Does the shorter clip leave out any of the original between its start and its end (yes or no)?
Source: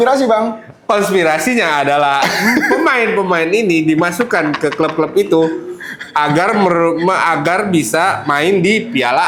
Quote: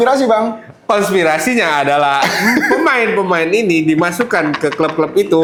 no